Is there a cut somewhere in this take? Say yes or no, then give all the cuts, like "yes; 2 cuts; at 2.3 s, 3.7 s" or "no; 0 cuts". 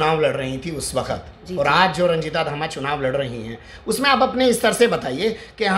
no; 0 cuts